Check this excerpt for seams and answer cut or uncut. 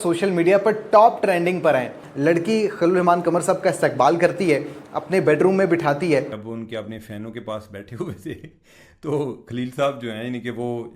cut